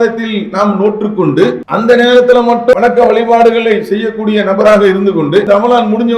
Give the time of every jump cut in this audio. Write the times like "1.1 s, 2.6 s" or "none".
1.6 s, 2.8 s, 5.5 s